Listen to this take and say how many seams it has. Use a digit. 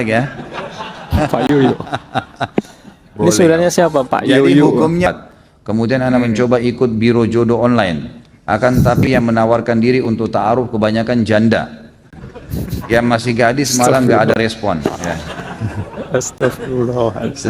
1